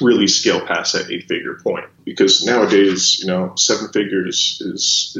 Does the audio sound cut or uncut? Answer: cut